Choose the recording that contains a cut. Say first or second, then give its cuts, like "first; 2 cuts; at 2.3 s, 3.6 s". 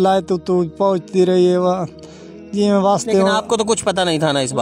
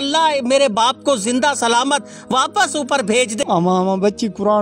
second; 1 cut; at 3.4 s